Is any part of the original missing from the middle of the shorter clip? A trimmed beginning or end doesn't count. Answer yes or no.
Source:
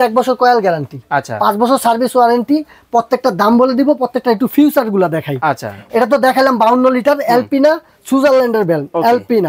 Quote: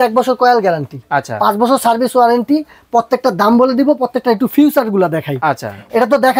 no